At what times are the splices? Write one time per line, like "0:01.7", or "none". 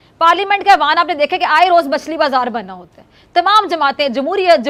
none